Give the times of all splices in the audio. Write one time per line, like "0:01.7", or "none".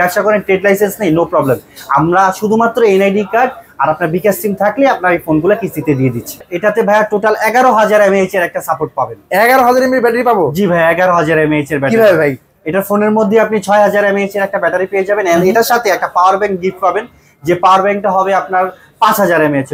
0:06.5